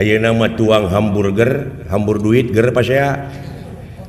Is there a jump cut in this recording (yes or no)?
no